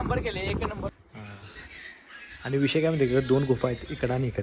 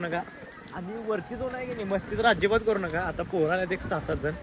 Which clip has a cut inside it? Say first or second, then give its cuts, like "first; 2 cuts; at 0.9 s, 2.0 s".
first; 1 cut; at 0.9 s